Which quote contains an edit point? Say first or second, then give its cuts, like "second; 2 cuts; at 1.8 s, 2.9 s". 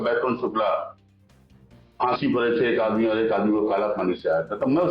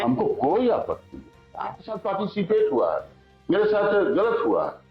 second; 1 cut; at 2.0 s